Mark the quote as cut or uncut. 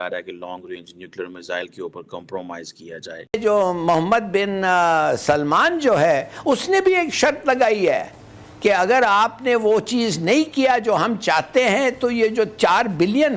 cut